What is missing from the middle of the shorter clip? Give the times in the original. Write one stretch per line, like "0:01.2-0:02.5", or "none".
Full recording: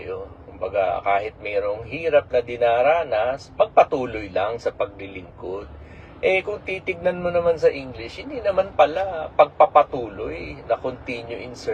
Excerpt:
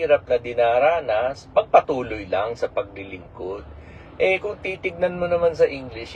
none